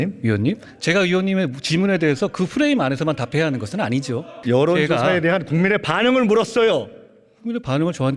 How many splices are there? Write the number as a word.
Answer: one